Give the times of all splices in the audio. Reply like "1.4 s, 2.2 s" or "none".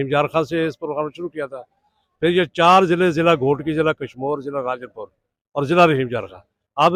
none